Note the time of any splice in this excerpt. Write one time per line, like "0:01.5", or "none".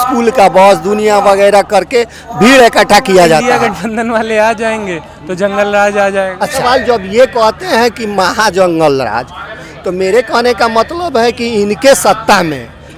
0:03.6
0:06.6